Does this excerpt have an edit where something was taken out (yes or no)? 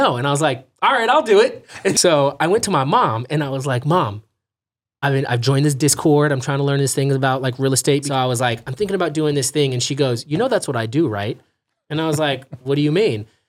yes